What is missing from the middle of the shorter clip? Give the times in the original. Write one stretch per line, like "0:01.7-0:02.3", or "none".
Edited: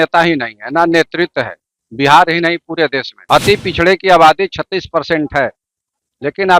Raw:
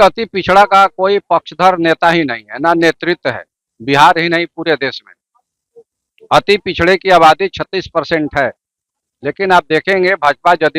0:05.0-0:06.1